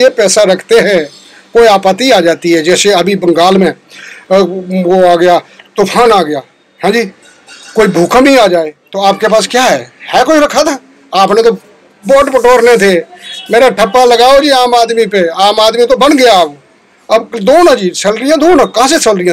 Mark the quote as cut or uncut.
cut